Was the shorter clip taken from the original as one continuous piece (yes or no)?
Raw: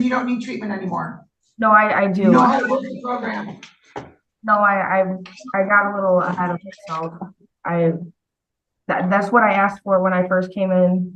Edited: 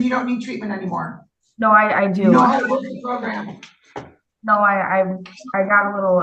yes